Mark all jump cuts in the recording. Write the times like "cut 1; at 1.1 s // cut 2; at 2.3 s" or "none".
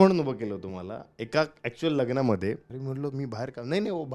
cut 1; at 2.8 s